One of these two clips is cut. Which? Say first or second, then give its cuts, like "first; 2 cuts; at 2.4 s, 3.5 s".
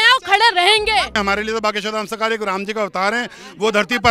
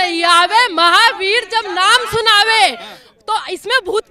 first; 1 cut; at 1.1 s